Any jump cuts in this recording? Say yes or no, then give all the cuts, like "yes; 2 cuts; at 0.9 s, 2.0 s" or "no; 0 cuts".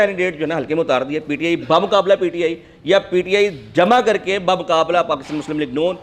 no; 0 cuts